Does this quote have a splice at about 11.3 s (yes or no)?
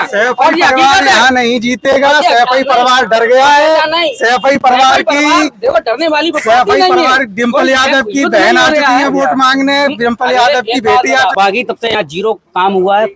yes